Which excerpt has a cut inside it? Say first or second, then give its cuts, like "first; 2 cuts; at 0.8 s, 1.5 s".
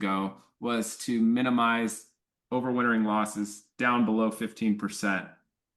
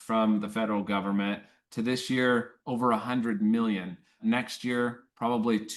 second; 1 cut; at 4.2 s